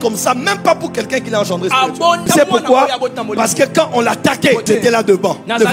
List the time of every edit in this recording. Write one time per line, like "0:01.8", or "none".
0:02.2
0:04.6